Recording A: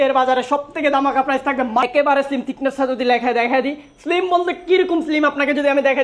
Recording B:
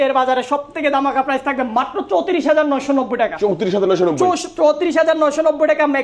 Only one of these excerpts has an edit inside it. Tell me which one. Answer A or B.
A